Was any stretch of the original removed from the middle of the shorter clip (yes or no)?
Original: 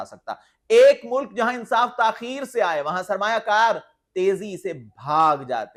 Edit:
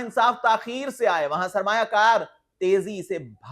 no